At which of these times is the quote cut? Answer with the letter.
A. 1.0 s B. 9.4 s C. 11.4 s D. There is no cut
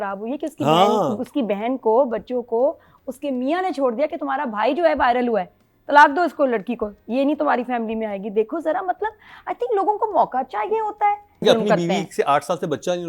C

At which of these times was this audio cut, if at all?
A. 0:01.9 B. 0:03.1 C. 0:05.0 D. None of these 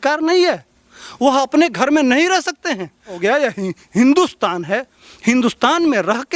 B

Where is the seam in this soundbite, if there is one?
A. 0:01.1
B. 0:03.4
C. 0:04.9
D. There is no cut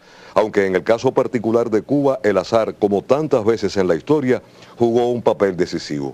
C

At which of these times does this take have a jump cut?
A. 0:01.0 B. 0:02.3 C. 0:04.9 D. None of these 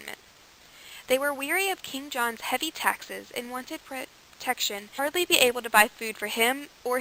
D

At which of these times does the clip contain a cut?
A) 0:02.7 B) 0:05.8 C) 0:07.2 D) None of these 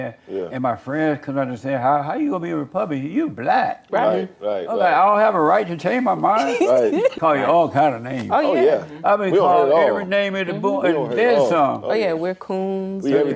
C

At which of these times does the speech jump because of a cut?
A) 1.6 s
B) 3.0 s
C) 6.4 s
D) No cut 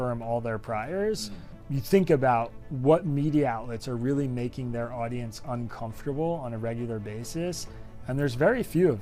A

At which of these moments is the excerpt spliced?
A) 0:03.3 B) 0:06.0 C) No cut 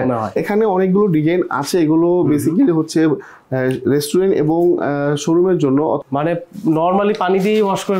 B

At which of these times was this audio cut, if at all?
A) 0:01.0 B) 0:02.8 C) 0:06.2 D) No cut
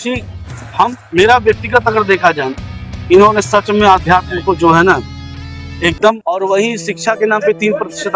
C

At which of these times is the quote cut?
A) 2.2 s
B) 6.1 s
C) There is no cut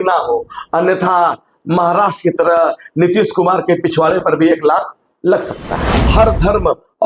B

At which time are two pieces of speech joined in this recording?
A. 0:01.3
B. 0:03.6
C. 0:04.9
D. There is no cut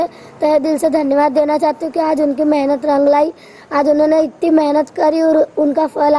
D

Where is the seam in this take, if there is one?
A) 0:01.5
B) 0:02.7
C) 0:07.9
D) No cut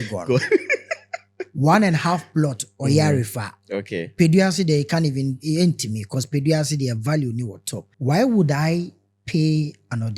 C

